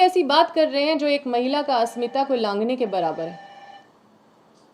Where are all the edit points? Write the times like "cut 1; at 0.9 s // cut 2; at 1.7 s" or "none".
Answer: none